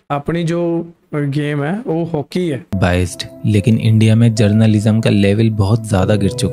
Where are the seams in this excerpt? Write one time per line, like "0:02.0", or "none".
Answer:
0:02.7